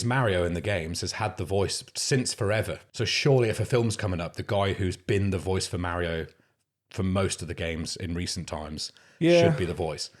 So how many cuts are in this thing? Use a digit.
1